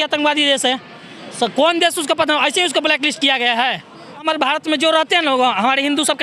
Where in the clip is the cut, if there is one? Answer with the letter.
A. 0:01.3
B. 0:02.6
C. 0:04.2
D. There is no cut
C